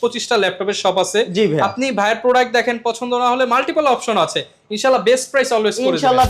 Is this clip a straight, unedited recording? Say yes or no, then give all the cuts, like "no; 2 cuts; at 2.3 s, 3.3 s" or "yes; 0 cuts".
yes; 0 cuts